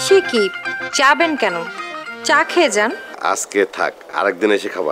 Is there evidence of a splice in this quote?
yes; 1 cut; at 3.1 s

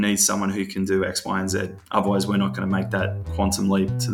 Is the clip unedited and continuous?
yes; 0 cuts

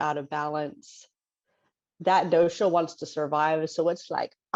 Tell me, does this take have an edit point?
no; 0 cuts

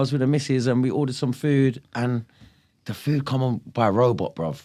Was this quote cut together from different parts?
no; 0 cuts

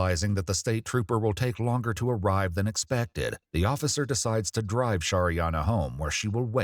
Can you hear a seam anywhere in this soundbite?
no; 0 cuts

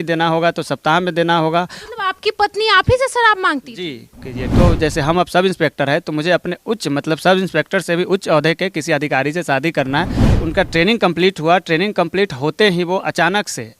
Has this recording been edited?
yes; 2 cuts; at 4.5 s, 10.3 s

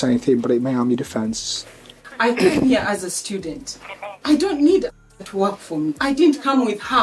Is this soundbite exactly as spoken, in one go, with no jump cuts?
yes; 0 cuts

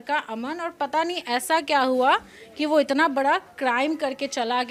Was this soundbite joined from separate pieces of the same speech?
no; 0 cuts

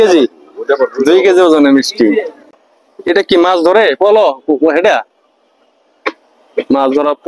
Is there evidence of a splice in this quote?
yes; 1 cut; at 2.3 s

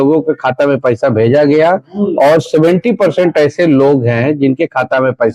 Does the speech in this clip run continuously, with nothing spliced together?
yes; 0 cuts

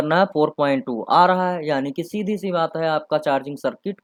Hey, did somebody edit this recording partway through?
no; 0 cuts

